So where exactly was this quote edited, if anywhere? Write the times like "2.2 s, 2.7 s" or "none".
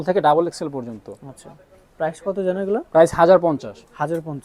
none